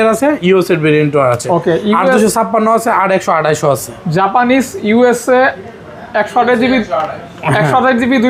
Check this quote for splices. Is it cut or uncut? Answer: uncut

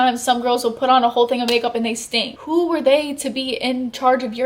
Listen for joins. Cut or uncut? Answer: cut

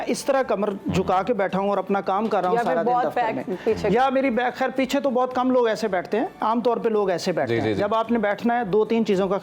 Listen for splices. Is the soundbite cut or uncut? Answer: uncut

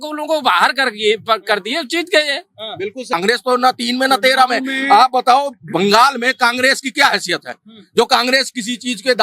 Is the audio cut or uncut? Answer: cut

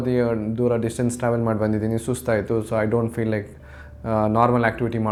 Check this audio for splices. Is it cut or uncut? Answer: uncut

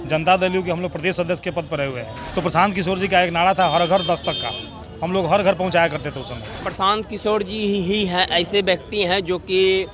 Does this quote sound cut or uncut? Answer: cut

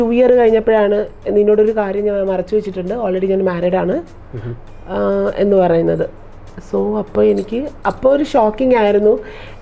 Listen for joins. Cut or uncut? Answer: uncut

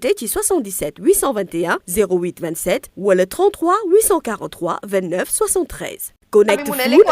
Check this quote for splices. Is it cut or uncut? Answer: cut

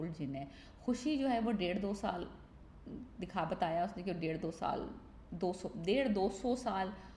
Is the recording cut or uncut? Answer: uncut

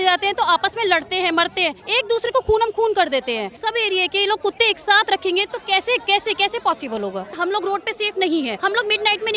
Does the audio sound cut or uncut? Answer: cut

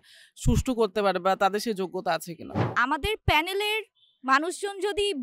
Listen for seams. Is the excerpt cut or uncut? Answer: cut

